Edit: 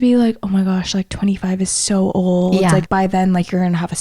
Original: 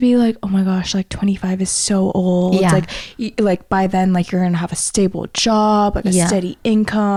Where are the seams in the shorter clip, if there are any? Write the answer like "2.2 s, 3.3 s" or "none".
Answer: 2.9 s